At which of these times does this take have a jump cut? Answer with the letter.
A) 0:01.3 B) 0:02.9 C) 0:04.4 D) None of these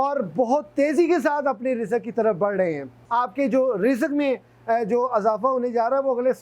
B